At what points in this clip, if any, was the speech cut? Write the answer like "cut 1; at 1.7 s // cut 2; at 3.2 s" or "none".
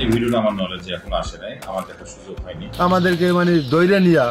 cut 1; at 2.5 s